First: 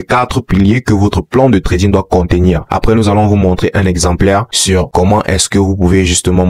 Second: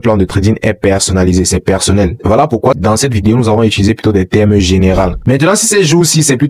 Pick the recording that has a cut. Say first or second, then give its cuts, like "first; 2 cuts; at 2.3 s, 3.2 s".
second; 2 cuts; at 2.2 s, 5.2 s